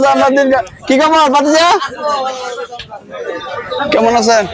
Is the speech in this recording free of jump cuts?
yes; 0 cuts

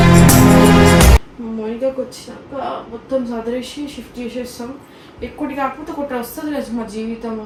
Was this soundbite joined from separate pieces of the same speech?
no; 0 cuts

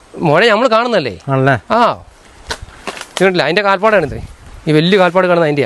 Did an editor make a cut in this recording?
no; 0 cuts

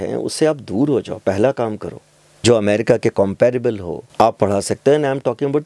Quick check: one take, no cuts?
no; 1 cut; at 2.2 s

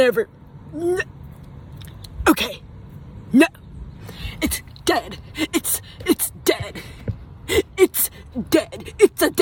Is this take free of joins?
yes; 0 cuts

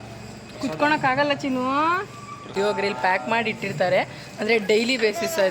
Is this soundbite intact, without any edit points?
no; 1 cut; at 2.5 s

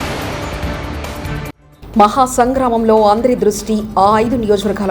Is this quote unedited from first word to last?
no; 1 cut; at 1.6 s

